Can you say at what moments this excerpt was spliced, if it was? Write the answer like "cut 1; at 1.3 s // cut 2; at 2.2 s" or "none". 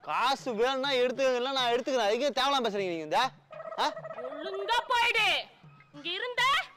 none

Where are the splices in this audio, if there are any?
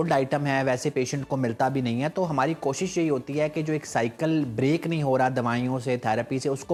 none

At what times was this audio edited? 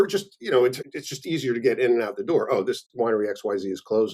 cut 1; at 2.9 s

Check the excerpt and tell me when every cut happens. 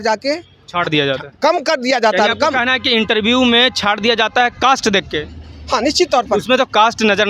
none

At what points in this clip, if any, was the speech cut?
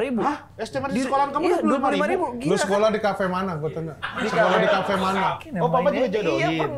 cut 1; at 5.4 s

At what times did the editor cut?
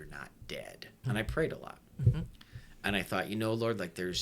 cut 1; at 0.9 s

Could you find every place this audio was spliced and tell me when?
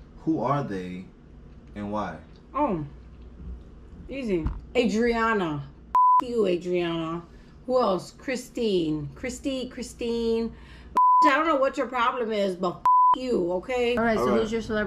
cut 1; at 4.6 s // cut 2; at 14.0 s

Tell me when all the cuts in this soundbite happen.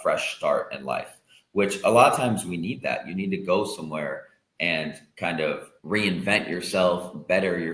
cut 1; at 5.7 s

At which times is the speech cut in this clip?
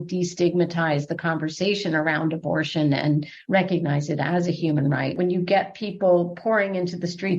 cut 1; at 5.1 s

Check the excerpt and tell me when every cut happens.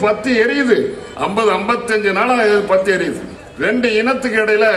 none

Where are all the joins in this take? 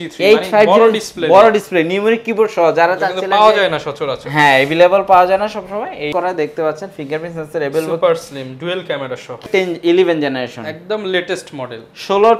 cut 1; at 6.1 s // cut 2; at 9.4 s

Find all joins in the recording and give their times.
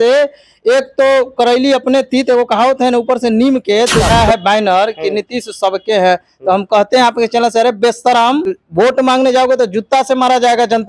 cut 1; at 4.1 s // cut 2; at 8.6 s

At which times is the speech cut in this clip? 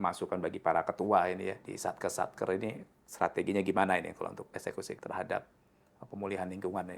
cut 1; at 1.7 s // cut 2; at 4.4 s

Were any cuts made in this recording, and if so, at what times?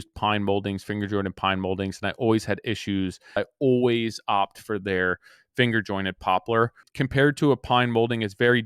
cut 1; at 3.4 s // cut 2; at 6.9 s

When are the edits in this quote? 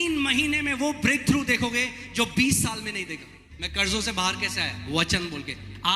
cut 1; at 3.7 s

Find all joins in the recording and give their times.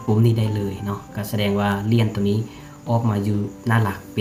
none

